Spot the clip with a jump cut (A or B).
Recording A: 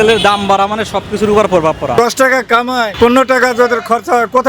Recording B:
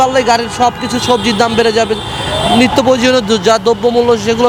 A